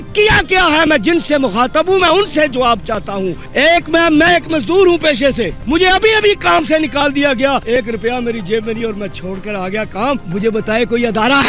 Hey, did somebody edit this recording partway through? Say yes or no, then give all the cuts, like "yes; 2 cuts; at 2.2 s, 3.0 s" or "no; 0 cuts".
yes; 4 cuts; at 3.4 s, 5.6 s, 7.6 s, 10.2 s